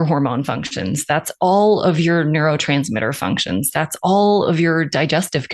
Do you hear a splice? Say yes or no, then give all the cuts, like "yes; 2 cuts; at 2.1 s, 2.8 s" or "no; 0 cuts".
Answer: no; 0 cuts